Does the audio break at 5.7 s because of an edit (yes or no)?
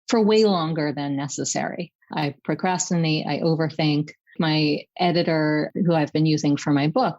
yes